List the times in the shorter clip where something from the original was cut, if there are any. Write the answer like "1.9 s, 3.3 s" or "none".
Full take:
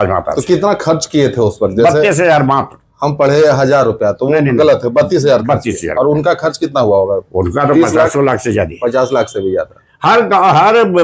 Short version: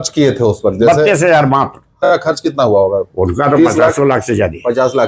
2.0 s